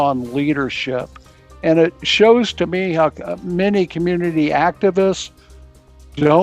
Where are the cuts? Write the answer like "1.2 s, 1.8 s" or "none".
none